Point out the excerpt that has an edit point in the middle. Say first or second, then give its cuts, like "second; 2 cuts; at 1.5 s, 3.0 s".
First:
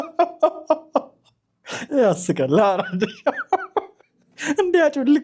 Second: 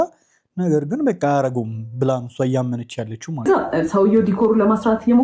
second; 1 cut; at 3.5 s